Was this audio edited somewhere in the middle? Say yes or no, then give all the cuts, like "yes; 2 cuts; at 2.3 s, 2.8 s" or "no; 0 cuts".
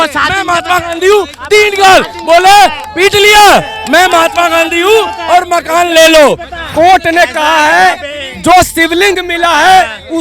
yes; 1 cut; at 6.6 s